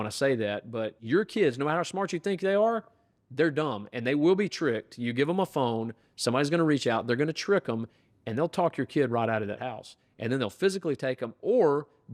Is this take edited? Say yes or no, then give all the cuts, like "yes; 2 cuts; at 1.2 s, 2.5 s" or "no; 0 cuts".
yes; 2 cuts; at 0.9 s, 9.6 s